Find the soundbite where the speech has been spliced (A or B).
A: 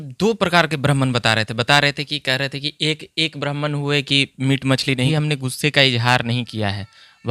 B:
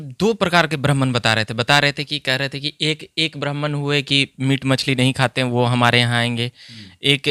A